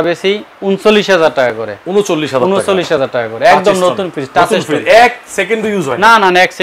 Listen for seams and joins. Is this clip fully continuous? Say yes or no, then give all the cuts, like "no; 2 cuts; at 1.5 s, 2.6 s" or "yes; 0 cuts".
yes; 0 cuts